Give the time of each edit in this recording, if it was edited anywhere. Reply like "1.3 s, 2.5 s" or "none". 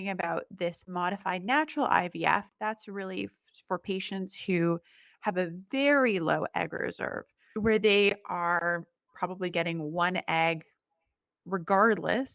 none